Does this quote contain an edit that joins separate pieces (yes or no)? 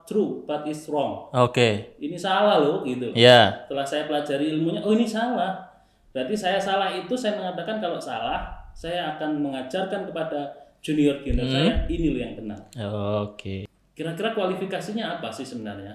yes